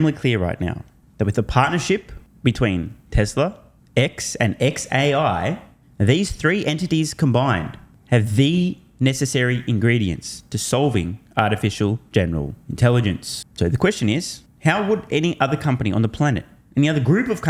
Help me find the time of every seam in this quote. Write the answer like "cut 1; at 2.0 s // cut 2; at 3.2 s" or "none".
none